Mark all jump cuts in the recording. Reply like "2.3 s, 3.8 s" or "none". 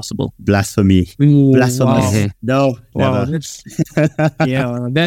none